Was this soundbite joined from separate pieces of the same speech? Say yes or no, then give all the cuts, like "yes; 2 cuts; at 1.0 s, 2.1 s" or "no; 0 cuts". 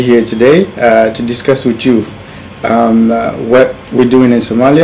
yes; 1 cut; at 1.4 s